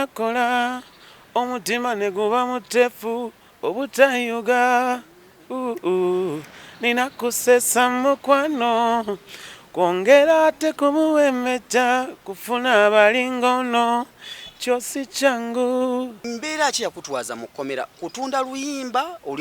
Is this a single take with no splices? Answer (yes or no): no